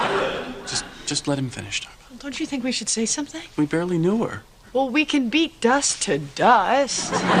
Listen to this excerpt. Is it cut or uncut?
cut